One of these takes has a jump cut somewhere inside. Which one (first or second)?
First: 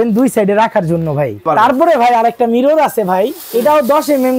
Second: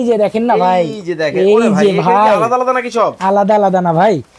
first